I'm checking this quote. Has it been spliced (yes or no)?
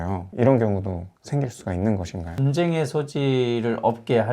yes